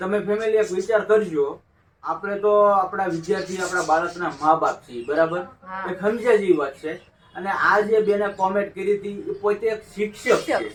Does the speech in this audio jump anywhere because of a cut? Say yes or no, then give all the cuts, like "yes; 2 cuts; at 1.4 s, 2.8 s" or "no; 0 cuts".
no; 0 cuts